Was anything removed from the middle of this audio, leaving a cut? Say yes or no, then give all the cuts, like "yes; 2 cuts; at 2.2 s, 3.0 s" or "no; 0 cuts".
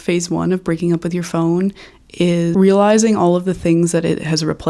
no; 0 cuts